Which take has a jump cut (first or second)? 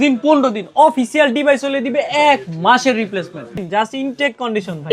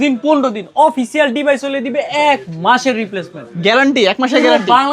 first